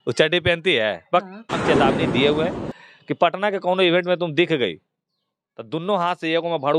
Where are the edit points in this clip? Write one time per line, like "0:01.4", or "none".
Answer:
0:01.6